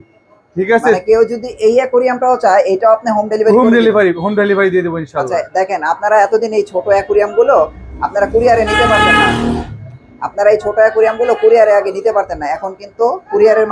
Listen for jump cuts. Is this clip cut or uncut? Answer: uncut